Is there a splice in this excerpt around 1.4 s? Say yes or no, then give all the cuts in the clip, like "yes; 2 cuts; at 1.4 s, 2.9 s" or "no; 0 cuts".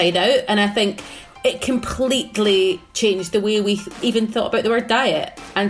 no; 2 cuts; at 2.9 s, 4.0 s